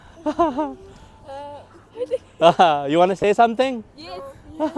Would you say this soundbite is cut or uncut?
uncut